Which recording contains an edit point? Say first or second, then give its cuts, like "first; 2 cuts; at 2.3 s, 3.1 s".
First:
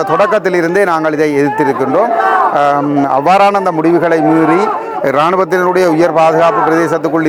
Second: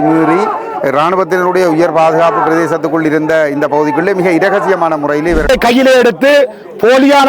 second; 1 cut; at 5.4 s